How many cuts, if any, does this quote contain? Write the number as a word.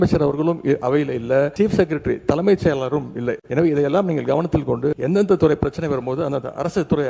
three